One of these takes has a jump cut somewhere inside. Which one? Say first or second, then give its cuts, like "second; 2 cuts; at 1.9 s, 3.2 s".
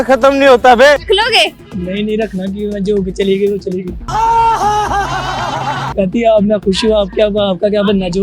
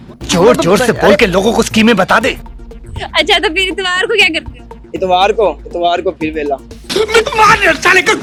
first; 2 cuts; at 1.0 s, 5.8 s